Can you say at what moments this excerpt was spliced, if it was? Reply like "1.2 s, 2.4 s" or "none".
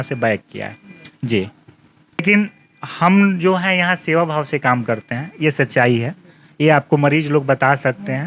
2.2 s